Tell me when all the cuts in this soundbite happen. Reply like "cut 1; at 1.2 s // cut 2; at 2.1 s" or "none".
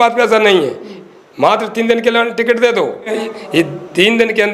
cut 1; at 3.2 s